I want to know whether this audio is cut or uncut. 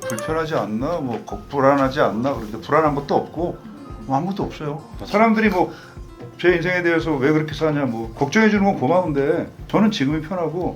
cut